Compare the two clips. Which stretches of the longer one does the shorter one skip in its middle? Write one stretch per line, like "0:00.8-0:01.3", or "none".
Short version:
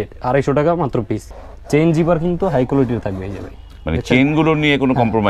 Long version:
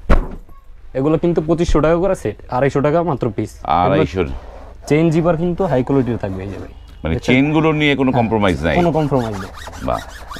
0:03.5-0:04.4